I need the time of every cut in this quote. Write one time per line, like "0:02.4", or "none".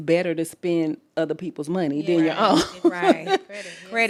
none